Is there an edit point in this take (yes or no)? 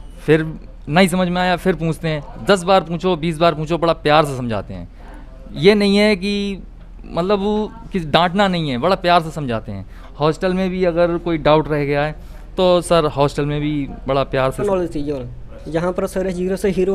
yes